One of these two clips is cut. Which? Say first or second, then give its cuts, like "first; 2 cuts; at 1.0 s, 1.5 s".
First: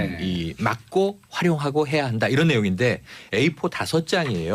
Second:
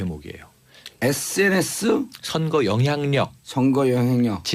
second; 1 cut; at 0.9 s